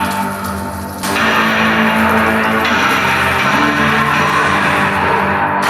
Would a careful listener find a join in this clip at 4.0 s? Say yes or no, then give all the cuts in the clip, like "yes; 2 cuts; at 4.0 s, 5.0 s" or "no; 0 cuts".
no; 1 cut; at 1.0 s